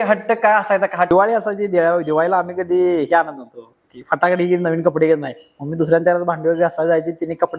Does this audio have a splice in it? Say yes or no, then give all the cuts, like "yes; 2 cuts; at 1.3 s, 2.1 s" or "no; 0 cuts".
yes; 1 cut; at 1.1 s